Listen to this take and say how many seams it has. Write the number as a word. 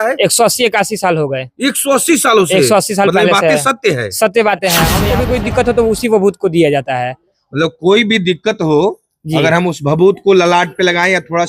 one